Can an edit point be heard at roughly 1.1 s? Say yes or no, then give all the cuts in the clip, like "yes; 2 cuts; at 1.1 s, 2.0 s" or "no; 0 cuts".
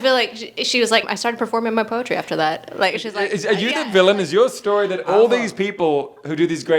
yes; 1 cut; at 1.1 s